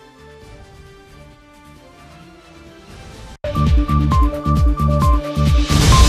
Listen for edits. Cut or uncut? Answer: cut